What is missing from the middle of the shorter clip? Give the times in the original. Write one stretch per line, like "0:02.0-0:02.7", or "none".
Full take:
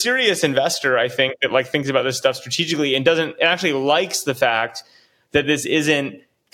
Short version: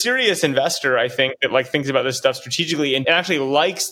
0:03.0-0:03.3